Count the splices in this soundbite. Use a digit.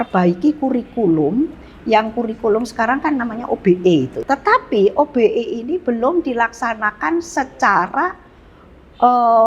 1